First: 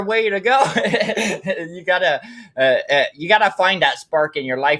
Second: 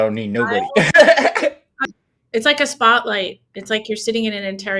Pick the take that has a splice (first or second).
second